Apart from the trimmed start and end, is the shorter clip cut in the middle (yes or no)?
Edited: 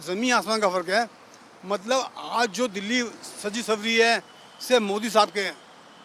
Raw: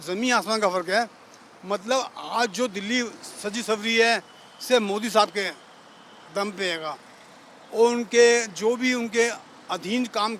no